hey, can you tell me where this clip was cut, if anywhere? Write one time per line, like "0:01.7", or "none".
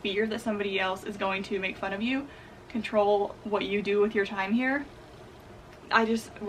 none